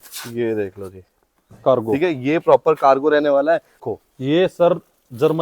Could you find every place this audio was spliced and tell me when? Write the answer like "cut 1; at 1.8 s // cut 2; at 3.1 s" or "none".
cut 1; at 3.9 s